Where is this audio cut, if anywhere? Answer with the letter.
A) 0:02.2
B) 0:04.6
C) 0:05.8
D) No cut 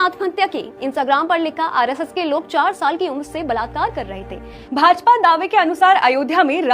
B